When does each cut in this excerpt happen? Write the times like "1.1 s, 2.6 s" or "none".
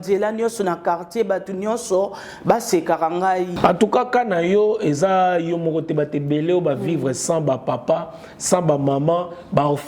3.5 s